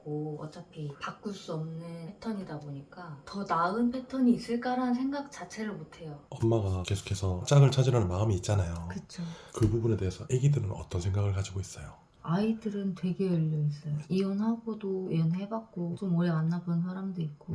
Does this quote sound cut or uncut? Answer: cut